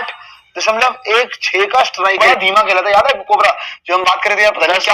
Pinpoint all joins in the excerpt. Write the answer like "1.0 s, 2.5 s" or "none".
2.2 s